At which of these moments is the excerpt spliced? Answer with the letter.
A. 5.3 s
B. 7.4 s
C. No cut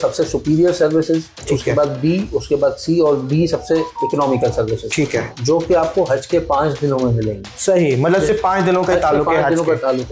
A